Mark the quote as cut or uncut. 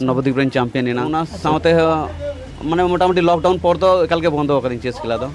cut